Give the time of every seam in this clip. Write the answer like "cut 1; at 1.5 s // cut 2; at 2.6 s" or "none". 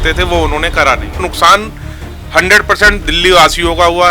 cut 1; at 1.2 s